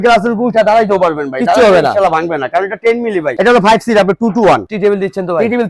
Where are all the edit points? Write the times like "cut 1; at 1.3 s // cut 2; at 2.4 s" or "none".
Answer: cut 1; at 3.4 s // cut 2; at 4.7 s